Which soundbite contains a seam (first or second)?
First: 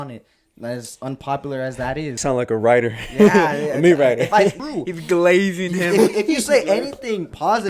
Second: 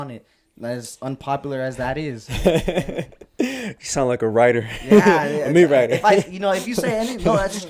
first